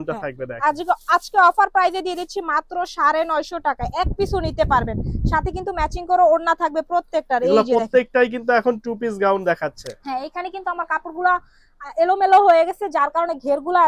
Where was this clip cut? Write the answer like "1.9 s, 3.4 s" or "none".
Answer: none